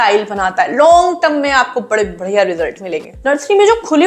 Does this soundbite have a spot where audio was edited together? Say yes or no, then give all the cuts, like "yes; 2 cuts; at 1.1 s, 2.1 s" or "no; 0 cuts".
yes; 1 cut; at 3.1 s